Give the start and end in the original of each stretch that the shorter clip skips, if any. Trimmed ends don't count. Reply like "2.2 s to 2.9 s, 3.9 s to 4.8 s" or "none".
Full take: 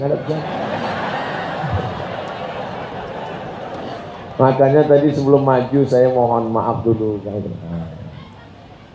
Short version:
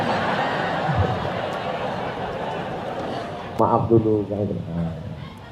4.3 s to 6.5 s